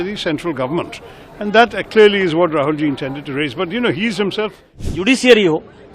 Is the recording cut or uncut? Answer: cut